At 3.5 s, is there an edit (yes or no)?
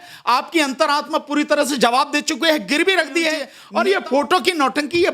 yes